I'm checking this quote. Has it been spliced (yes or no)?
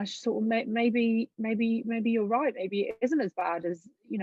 no